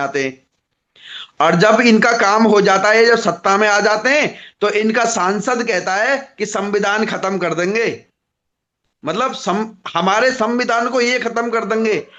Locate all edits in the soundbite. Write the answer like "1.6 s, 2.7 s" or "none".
none